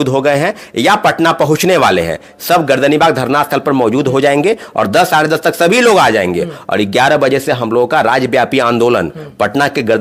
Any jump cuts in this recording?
no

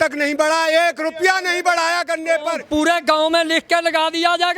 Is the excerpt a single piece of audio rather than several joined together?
no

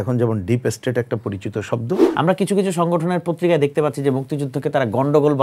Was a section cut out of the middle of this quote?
yes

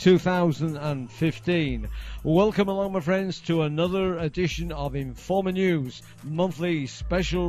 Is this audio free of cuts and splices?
no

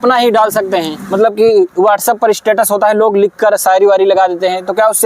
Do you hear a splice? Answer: yes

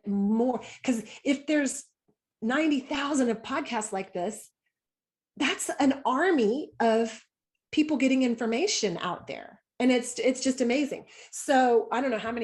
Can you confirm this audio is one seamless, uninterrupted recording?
yes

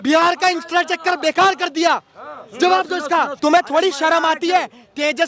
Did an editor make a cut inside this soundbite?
yes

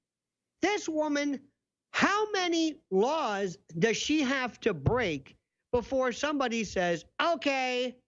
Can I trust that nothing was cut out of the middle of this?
yes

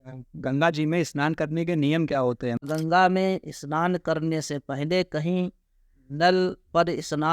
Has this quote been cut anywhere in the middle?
yes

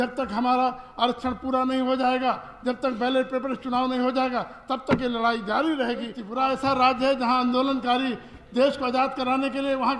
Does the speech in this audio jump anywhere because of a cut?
yes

